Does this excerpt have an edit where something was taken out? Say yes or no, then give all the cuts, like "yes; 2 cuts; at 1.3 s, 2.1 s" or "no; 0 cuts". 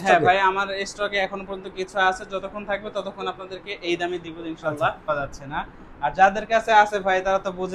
yes; 1 cut; at 5.1 s